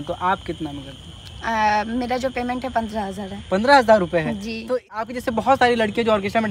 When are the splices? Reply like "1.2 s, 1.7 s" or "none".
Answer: 5.0 s